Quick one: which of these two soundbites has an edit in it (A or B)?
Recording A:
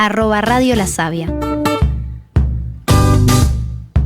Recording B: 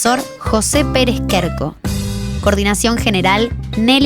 A